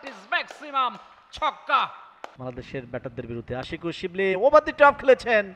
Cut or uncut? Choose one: cut